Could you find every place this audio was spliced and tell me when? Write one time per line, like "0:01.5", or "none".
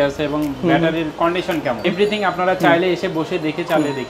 0:01.8